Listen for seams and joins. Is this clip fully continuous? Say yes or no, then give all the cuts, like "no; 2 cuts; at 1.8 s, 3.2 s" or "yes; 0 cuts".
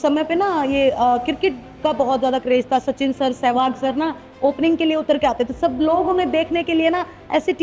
yes; 0 cuts